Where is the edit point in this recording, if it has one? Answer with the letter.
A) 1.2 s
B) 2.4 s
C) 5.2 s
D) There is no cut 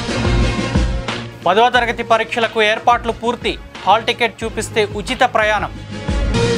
D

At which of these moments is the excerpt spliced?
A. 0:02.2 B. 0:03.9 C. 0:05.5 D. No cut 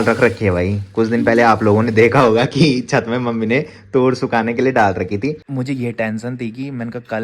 C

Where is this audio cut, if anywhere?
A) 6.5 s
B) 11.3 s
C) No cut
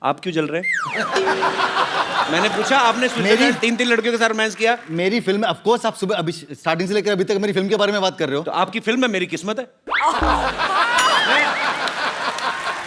C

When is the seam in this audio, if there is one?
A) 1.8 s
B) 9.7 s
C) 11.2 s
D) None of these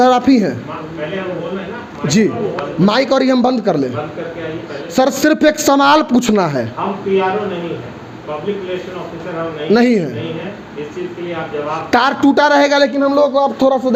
D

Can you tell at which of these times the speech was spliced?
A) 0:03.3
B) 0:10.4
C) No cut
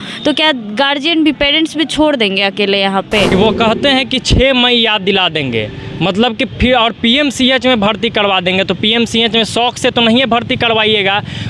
A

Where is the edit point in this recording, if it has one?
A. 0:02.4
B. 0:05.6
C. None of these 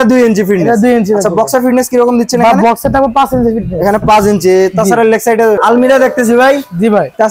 B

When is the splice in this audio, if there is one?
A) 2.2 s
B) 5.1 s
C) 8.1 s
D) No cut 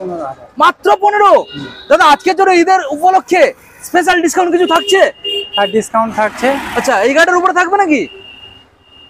D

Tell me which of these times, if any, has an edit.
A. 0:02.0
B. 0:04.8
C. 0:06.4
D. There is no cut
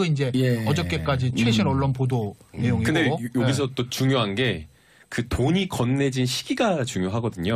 A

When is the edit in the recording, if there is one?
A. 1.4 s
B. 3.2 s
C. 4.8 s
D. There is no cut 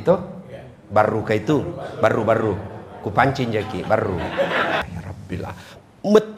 C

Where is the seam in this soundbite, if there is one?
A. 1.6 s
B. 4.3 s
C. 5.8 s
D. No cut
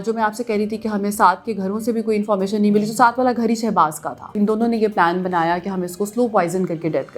B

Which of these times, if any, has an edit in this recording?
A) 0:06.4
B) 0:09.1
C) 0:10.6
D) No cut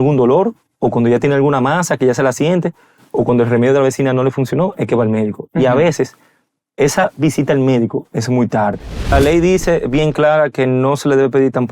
B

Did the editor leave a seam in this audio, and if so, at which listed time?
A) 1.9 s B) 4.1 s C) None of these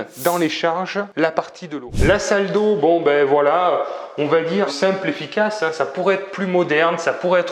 A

